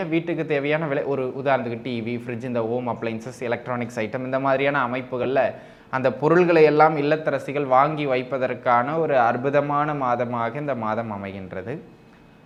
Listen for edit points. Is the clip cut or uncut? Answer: uncut